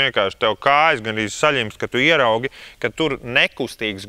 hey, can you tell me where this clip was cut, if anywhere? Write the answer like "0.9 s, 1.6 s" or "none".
none